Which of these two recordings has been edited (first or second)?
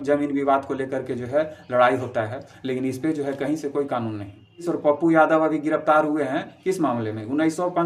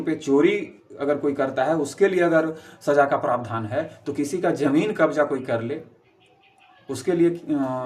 first